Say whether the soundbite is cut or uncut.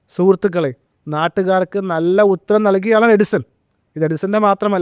uncut